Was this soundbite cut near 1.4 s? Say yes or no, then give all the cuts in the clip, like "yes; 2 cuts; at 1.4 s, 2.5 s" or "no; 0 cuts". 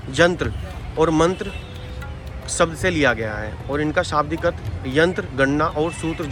no; 0 cuts